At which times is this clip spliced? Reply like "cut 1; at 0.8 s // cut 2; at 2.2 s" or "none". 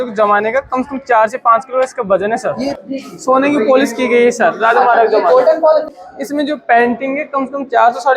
cut 1; at 2.8 s // cut 2; at 5.9 s